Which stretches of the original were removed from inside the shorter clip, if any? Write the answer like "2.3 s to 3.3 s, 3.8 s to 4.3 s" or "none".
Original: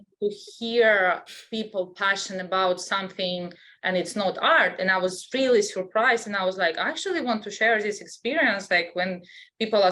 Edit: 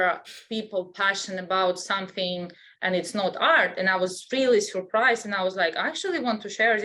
none